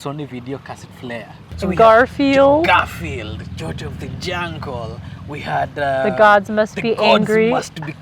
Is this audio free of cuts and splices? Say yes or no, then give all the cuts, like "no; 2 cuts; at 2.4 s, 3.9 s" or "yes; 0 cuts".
no; 1 cut; at 1.4 s